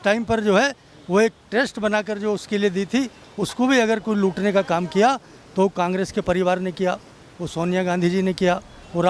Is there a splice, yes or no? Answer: no